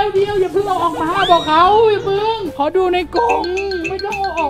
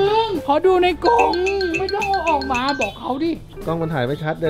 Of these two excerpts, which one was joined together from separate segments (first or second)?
second